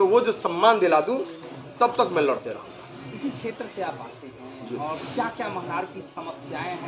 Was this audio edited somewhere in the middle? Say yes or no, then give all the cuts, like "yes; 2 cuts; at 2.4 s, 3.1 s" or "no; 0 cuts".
no; 0 cuts